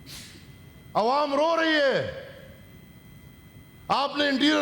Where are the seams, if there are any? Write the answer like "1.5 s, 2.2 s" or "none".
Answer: none